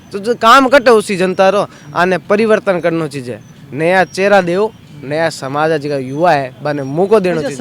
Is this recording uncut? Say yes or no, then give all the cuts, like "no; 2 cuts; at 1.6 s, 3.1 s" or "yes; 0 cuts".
yes; 0 cuts